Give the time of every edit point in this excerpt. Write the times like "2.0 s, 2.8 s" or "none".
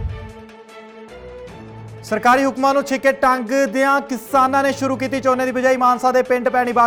none